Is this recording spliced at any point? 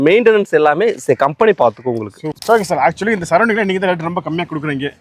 yes; 1 cut; at 2.3 s

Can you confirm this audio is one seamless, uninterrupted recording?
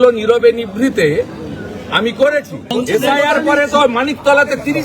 no; 1 cut; at 2.7 s

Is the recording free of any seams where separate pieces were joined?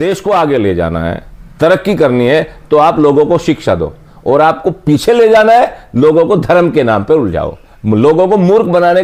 yes; 0 cuts

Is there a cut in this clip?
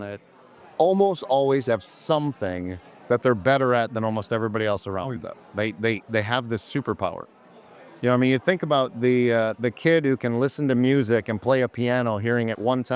no; 0 cuts

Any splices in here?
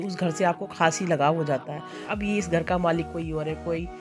yes; 1 cut; at 2.0 s

